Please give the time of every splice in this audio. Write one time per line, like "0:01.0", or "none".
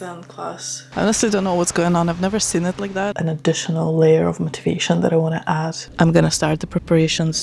0:00.9
0:03.1
0:05.8

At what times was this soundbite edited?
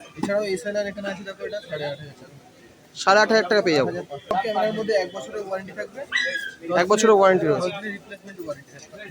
0:04.3

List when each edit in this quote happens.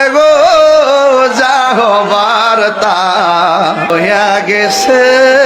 0:03.9

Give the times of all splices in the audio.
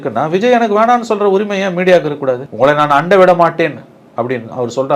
0:02.5

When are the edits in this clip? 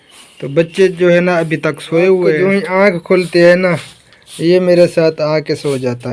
0:02.4

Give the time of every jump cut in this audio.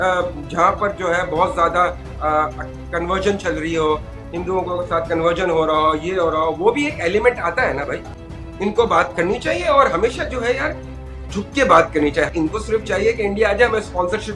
0:08.1
0:12.5

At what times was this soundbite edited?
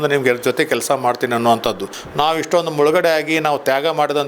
0:02.0

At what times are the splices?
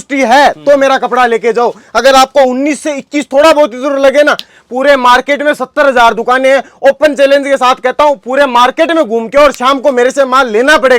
none

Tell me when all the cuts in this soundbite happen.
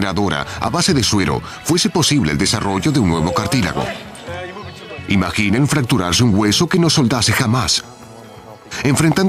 0:01.5

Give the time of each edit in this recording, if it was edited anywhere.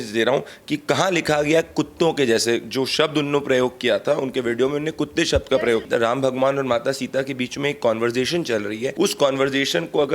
0:05.9
0:08.9

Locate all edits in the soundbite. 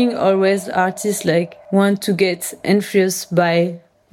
0:01.6

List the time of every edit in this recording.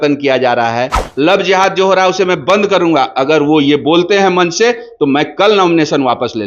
0:01.0

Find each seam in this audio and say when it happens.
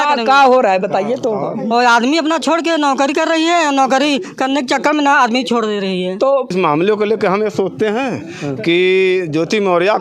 0:06.5

